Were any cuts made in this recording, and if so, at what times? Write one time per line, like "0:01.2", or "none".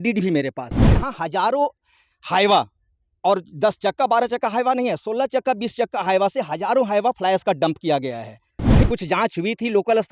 0:01.0
0:08.9